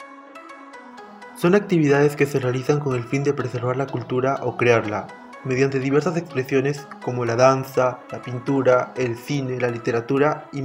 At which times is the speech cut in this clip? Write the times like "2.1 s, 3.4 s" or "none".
0.9 s